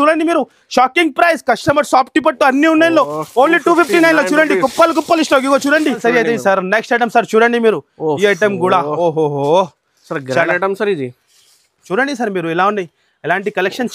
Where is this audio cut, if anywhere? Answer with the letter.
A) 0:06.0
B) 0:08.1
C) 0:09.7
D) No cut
A